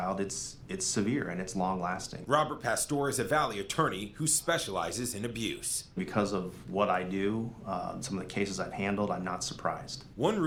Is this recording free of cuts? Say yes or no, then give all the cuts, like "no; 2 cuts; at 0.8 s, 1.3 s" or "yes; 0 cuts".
yes; 0 cuts